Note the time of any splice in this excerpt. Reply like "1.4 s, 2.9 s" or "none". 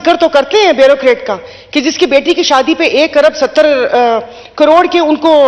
none